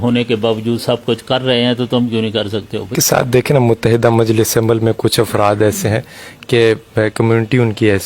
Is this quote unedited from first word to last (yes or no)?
no